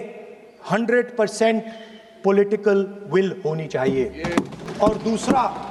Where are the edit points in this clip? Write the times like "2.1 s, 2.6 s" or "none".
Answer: none